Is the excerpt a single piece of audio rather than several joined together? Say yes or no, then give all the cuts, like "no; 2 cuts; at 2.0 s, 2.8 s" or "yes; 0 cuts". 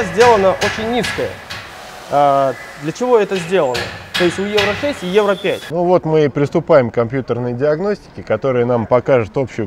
no; 1 cut; at 5.6 s